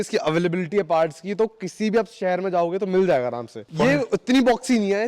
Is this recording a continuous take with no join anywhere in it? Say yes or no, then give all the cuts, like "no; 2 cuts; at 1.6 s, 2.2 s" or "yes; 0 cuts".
no; 1 cut; at 3.6 s